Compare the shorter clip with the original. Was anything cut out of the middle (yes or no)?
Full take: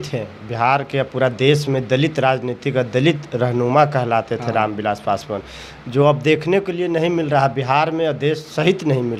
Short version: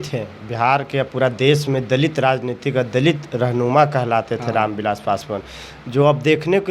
no